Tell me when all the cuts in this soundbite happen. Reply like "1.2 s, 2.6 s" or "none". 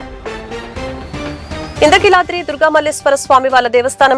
1.3 s